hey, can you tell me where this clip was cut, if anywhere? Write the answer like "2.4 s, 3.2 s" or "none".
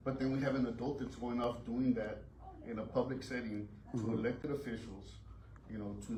none